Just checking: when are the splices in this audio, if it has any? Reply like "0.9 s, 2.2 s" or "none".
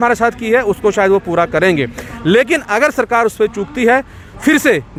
none